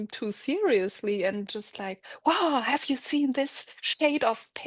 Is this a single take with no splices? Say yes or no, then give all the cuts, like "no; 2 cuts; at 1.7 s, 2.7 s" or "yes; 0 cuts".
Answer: yes; 0 cuts